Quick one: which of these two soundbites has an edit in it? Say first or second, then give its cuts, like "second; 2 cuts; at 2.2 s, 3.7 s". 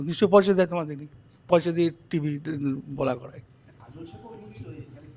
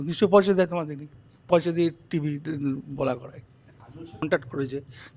second; 1 cut; at 4.2 s